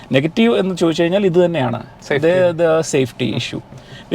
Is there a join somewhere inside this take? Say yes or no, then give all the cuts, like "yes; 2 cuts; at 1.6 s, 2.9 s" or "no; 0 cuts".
no; 0 cuts